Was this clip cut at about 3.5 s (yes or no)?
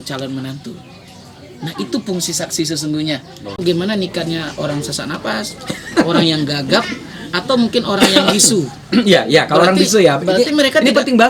yes